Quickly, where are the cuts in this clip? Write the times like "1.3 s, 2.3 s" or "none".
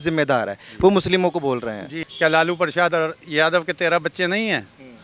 1.9 s